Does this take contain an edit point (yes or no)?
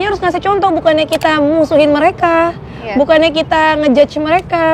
no